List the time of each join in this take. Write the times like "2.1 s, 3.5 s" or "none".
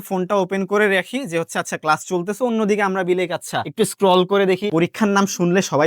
4.7 s